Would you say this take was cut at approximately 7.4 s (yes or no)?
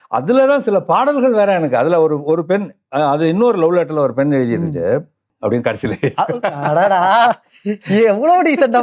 no